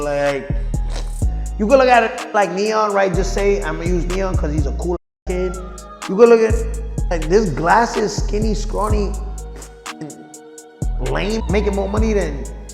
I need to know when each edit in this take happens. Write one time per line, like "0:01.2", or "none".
0:11.4